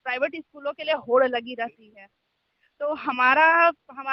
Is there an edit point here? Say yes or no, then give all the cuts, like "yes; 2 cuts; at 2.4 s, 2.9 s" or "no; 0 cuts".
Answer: no; 0 cuts